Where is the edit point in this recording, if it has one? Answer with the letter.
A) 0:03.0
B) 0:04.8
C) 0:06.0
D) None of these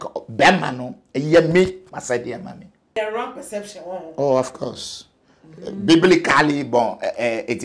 A